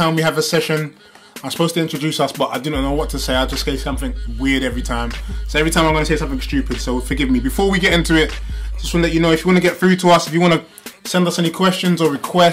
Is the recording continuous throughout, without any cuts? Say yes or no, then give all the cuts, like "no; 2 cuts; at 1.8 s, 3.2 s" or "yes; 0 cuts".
no; 1 cut; at 5.9 s